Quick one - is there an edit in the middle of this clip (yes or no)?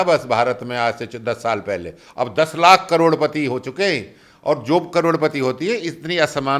no